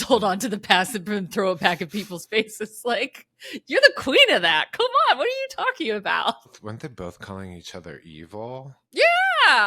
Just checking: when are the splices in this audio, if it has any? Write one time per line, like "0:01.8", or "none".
0:06.6
0:08.8

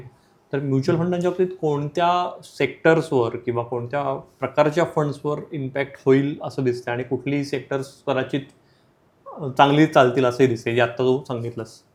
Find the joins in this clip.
none

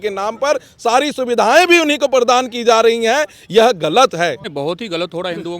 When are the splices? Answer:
0:04.4

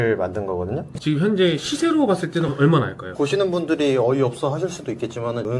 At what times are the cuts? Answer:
0:00.9

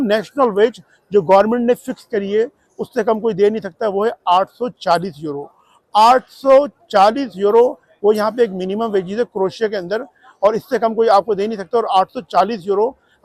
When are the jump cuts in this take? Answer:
none

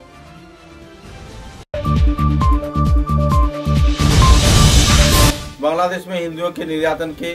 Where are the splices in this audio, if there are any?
0:01.7
0:05.3

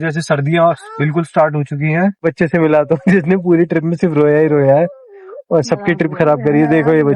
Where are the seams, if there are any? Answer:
0:02.2

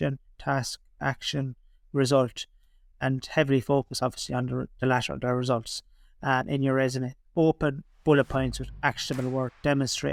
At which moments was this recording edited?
none

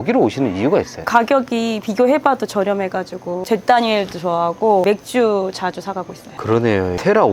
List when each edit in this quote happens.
0:06.3

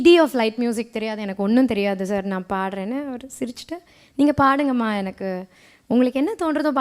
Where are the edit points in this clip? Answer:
none

